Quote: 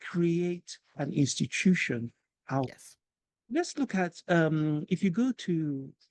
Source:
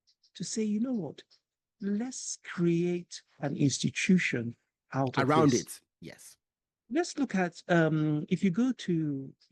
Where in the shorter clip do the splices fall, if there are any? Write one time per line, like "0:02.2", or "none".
0:02.7